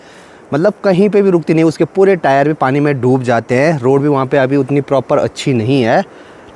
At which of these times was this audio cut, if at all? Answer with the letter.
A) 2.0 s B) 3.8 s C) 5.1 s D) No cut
D